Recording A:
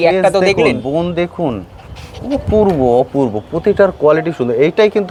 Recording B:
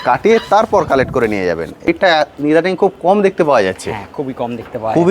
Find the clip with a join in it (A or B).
B